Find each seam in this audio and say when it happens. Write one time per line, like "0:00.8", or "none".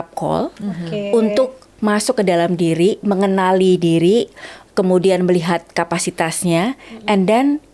none